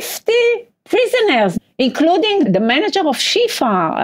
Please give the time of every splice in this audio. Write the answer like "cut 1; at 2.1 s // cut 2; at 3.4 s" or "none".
cut 1; at 1.5 s // cut 2; at 2.5 s